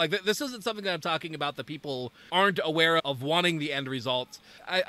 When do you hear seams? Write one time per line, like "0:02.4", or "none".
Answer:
0:02.2
0:03.0